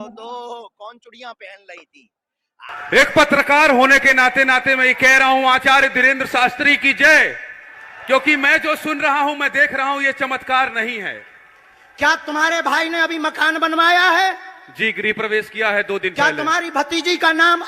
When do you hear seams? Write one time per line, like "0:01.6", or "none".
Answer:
0:02.7